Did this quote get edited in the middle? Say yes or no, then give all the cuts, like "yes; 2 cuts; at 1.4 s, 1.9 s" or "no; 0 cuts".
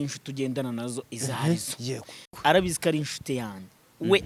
yes; 1 cut; at 2.3 s